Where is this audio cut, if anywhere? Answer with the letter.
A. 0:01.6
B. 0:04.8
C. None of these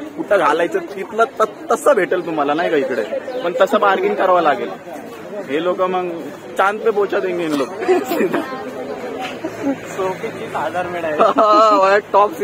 C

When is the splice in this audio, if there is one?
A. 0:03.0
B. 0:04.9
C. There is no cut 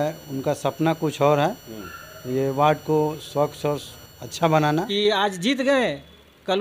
B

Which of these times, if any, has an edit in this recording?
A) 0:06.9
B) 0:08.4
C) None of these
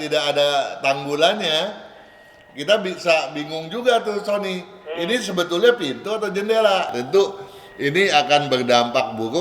A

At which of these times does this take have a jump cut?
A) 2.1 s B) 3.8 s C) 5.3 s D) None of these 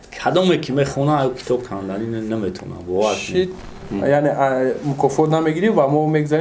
B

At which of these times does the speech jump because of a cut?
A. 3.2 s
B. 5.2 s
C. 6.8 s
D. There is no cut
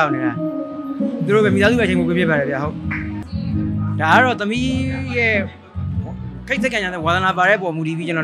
A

